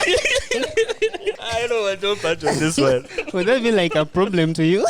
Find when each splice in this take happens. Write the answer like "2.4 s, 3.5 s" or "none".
1.4 s, 3.2 s